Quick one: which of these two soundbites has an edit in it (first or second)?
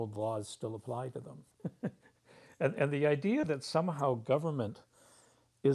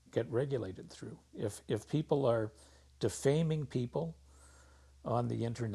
first